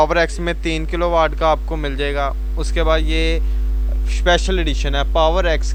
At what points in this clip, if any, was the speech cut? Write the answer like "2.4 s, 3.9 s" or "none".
none

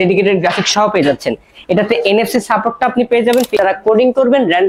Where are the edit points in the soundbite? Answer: 3.6 s

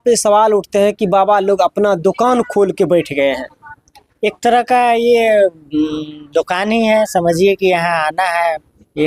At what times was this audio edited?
none

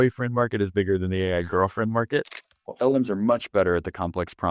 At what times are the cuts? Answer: 2.7 s

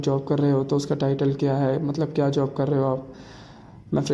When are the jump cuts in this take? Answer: none

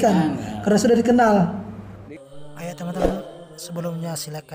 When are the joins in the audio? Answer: 2.1 s

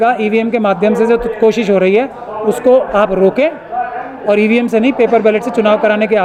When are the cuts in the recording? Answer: none

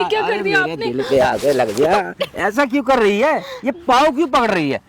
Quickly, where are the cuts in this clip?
none

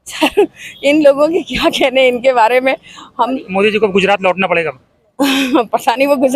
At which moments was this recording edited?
3.3 s

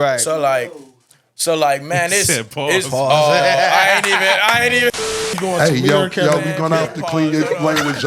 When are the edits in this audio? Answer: none

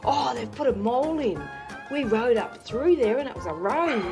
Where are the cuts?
none

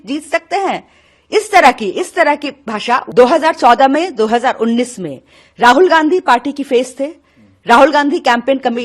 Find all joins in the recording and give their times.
3.1 s

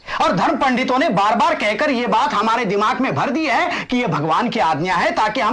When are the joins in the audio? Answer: none

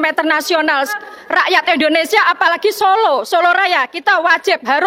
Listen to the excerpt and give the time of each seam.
1.0 s

